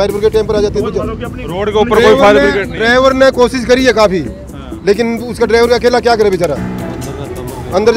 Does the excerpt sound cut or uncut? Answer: uncut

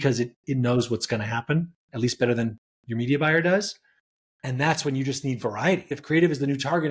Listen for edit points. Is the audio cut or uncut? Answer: cut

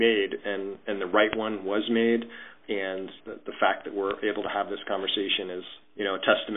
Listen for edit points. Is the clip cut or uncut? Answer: uncut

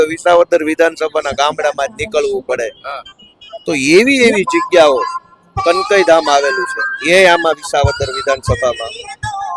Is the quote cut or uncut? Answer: uncut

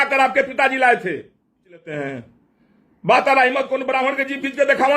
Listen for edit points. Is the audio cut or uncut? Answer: cut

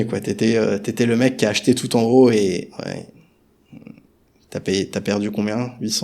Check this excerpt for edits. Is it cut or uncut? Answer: uncut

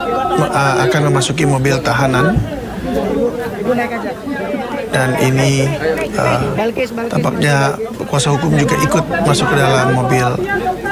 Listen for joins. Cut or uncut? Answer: uncut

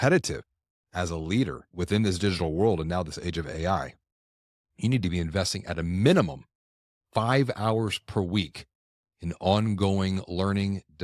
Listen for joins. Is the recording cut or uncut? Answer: cut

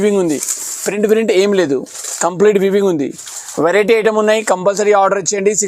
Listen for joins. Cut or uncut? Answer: uncut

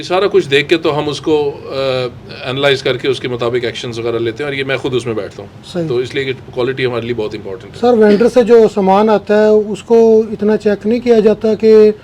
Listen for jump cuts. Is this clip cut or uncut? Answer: uncut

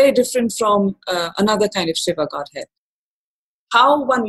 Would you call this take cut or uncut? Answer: cut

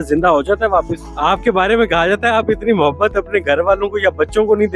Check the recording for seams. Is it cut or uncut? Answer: cut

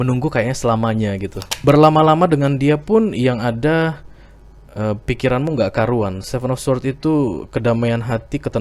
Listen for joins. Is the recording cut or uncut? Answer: cut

